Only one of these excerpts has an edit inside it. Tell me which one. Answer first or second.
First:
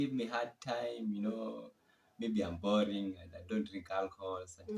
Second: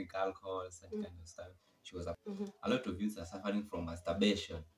second